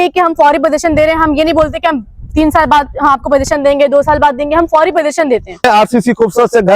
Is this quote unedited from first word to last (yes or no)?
no